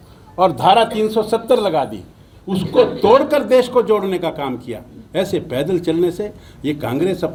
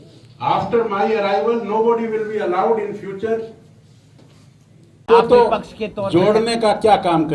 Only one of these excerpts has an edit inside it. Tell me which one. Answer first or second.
second